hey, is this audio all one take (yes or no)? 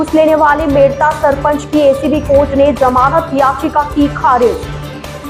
yes